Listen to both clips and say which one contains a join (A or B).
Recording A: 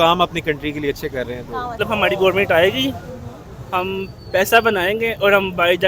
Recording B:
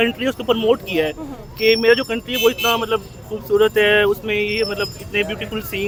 A